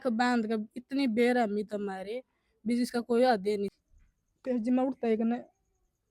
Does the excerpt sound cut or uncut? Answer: cut